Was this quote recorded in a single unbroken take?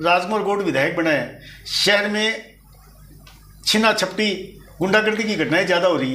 yes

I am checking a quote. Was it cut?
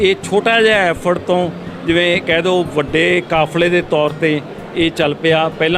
no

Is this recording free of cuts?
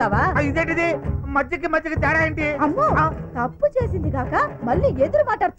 yes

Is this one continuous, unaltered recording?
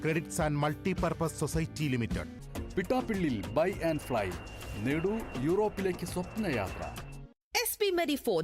yes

